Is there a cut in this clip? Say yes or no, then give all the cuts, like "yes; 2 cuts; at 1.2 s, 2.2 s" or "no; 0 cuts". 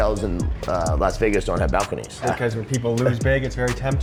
no; 0 cuts